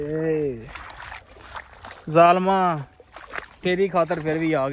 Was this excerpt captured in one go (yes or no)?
yes